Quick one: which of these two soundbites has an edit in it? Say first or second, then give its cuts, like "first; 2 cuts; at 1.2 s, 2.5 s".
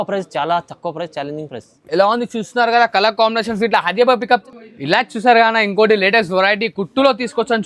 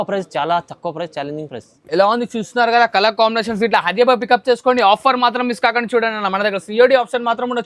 first; 1 cut; at 4.4 s